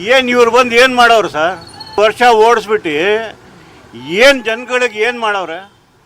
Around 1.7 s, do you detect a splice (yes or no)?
yes